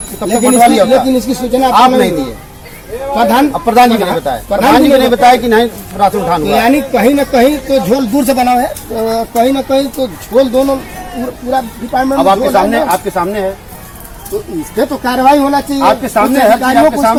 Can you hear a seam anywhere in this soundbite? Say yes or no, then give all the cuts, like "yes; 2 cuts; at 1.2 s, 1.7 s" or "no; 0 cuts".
no; 0 cuts